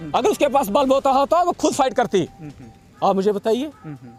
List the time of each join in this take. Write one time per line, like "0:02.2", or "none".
none